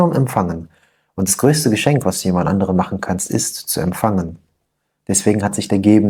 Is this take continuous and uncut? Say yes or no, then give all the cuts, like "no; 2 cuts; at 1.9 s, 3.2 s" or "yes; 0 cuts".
yes; 0 cuts